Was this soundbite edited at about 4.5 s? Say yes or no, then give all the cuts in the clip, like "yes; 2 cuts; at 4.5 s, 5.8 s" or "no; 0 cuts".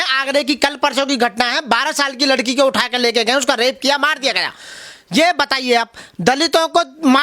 no; 0 cuts